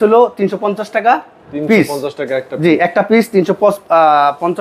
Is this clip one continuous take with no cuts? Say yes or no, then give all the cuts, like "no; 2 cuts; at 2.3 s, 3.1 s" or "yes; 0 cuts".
yes; 0 cuts